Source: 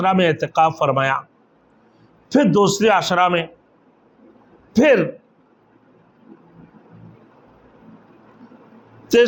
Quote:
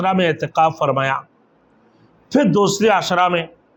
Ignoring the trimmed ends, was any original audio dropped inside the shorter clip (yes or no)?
no